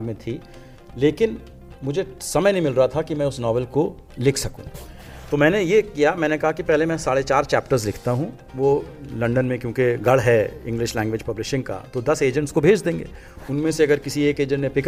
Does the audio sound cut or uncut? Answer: uncut